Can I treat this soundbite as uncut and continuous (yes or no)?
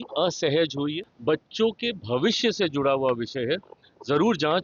no